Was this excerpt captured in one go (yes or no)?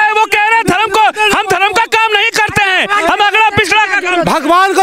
yes